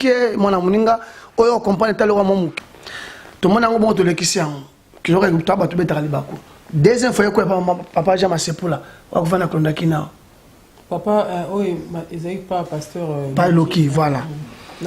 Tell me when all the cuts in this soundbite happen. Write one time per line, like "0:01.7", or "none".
0:02.5